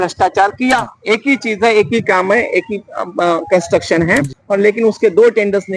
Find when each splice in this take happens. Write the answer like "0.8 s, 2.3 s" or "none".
0.9 s, 4.3 s